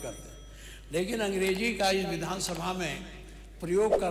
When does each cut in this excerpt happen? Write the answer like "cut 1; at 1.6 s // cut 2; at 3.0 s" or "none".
none